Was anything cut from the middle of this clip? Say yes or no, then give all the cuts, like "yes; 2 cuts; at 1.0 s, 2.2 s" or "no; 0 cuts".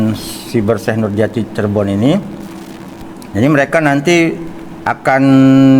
no; 0 cuts